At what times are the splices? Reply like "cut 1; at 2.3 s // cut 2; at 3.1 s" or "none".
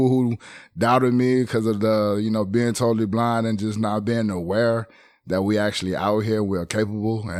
none